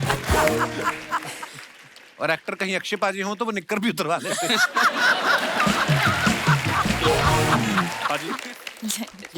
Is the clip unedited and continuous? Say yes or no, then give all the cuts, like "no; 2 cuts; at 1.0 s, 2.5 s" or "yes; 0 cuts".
no; 1 cut; at 8.1 s